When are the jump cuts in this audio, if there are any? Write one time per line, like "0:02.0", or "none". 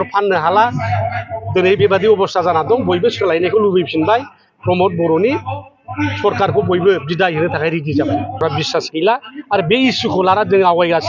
0:08.4